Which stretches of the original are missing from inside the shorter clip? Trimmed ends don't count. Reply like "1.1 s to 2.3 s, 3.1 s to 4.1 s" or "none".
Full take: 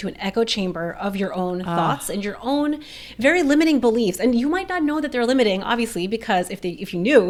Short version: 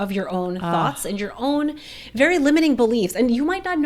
none